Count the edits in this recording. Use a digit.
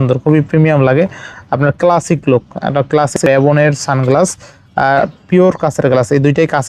1